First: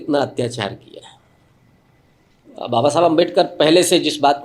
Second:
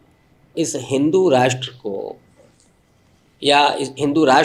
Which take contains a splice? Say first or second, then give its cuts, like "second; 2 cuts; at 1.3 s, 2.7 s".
first; 1 cut; at 2.5 s